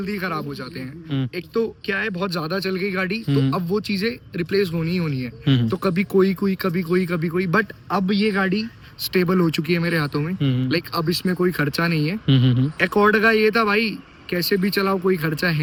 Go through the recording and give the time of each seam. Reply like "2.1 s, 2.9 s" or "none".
none